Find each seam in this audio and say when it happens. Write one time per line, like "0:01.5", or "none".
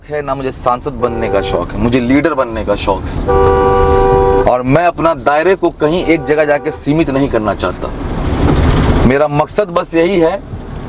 none